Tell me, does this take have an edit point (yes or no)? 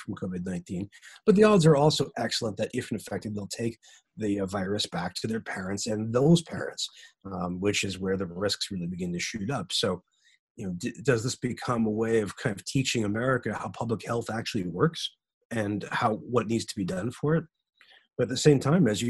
no